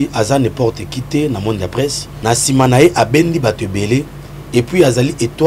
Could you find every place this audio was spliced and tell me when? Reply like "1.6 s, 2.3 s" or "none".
2.1 s